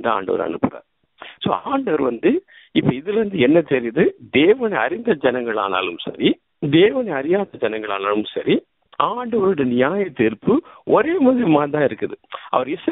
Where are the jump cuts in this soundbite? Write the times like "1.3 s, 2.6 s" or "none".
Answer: 6.5 s, 8.8 s